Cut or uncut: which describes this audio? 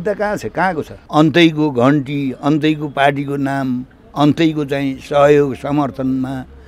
cut